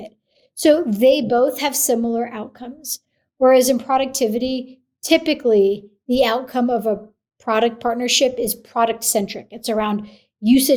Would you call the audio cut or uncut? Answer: uncut